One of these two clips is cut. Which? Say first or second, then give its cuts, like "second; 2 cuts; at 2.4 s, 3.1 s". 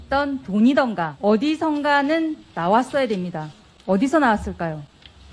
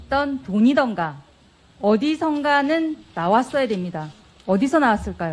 first; 1 cut; at 1.1 s